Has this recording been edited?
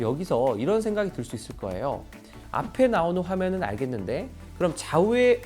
no; 0 cuts

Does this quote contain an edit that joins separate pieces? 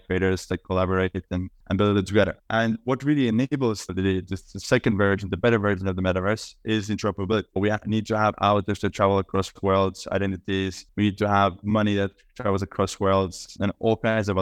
no; 0 cuts

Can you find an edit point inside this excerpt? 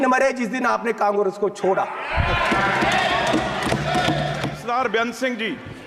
yes; 1 cut; at 4.5 s

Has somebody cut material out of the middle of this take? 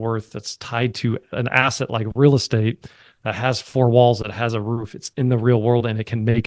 yes; 1 cut; at 1.3 s

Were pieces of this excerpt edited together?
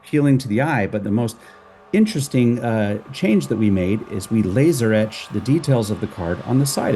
no; 0 cuts

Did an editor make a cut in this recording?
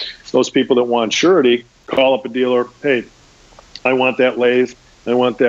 yes; 1 cut; at 1.8 s

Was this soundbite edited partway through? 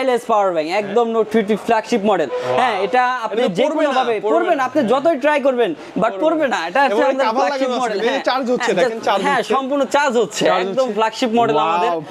no; 0 cuts

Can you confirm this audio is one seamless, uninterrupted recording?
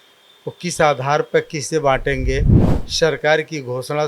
no; 1 cut; at 2.7 s

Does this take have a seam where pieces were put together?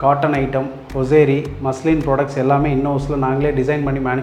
no; 0 cuts

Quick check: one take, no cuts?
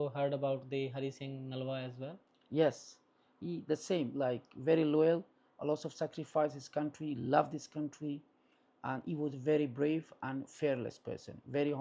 yes; 0 cuts

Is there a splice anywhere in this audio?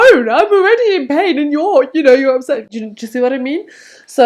no; 0 cuts

